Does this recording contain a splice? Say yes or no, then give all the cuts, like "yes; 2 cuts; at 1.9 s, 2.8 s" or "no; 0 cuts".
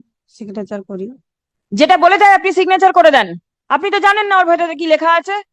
no; 0 cuts